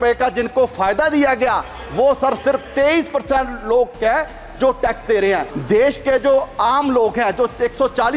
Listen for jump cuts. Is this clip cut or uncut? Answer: cut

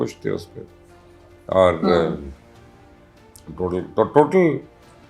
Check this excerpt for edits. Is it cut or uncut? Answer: uncut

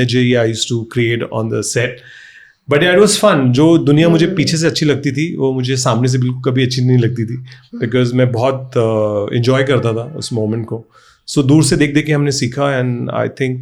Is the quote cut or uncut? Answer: uncut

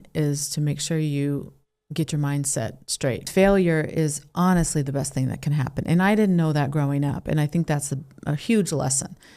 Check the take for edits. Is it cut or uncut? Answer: cut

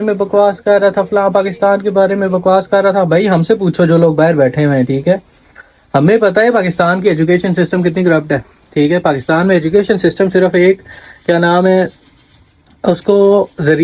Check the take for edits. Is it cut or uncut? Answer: uncut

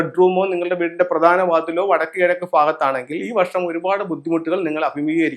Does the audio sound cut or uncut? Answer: uncut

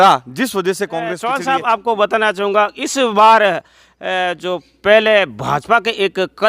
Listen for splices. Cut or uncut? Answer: cut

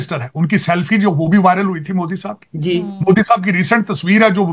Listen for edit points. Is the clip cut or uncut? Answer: uncut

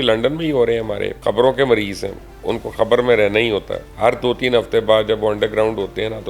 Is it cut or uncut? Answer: cut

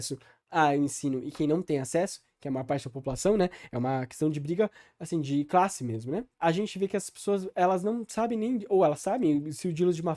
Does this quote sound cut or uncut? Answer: cut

